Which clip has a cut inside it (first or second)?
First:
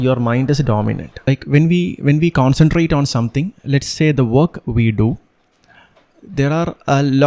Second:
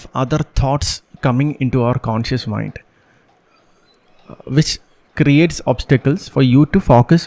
first